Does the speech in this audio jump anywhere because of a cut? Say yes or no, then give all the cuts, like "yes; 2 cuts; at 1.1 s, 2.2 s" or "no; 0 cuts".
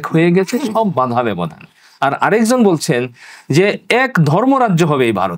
no; 0 cuts